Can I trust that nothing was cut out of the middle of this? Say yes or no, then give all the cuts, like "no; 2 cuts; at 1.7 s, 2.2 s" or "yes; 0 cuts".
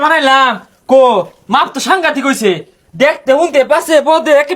yes; 0 cuts